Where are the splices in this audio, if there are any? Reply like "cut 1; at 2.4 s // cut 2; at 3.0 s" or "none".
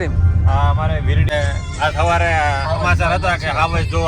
cut 1; at 1.3 s